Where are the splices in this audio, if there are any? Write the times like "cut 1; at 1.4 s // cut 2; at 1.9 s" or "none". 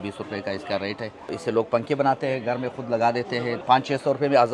cut 1; at 1.3 s // cut 2; at 3.6 s